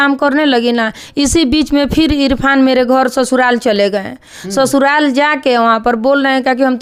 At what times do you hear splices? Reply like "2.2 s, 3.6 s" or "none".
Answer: none